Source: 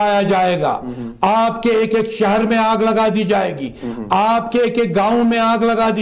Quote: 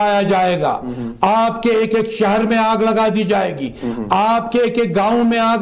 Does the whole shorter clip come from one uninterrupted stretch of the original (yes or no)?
yes